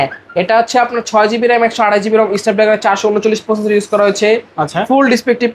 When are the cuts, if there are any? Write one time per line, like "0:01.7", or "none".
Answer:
none